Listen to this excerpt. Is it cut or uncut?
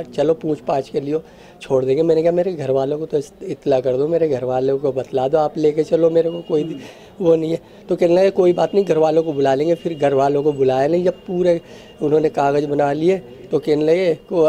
uncut